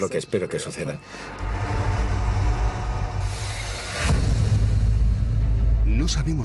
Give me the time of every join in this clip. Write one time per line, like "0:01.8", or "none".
0:01.0